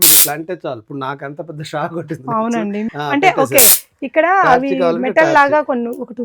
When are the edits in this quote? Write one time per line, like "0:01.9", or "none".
0:02.8